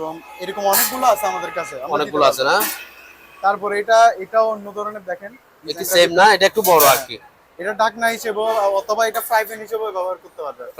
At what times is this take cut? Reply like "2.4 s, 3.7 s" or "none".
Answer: none